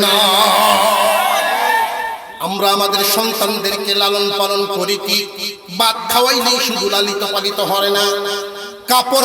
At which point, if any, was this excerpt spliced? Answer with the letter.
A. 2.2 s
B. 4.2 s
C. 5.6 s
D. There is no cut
A